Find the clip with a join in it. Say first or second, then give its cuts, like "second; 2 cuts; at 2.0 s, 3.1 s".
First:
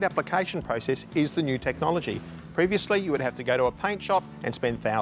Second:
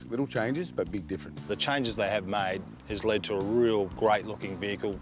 second; 2 cuts; at 1.5 s, 3.9 s